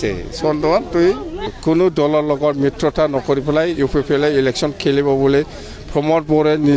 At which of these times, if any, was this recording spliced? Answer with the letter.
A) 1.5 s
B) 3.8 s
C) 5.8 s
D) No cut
A